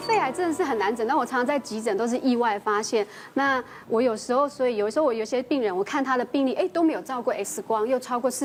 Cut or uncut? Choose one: uncut